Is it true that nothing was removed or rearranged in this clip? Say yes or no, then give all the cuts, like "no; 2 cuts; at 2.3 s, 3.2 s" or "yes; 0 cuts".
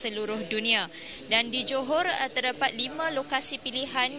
no; 1 cut; at 3.1 s